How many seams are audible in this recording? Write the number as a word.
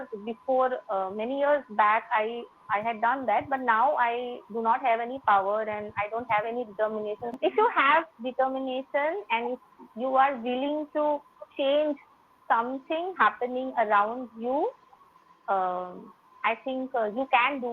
one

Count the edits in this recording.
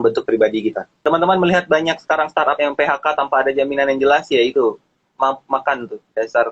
one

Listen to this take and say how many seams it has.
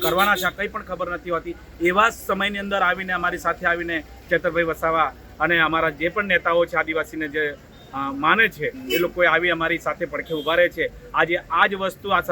zero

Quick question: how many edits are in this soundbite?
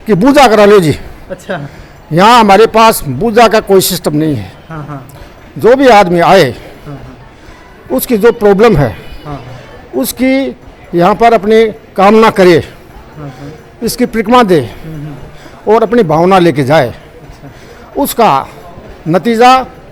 zero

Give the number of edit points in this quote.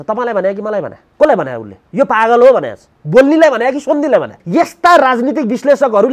two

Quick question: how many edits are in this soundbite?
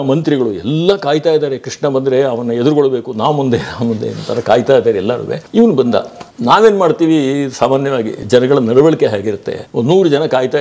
zero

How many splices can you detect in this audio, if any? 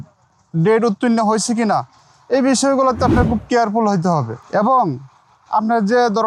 zero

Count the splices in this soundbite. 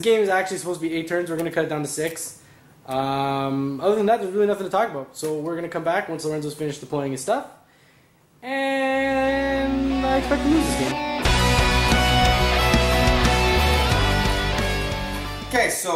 one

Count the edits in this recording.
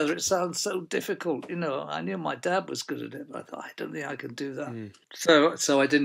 one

